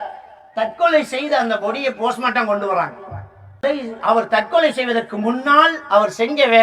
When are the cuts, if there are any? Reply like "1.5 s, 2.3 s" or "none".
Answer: 3.6 s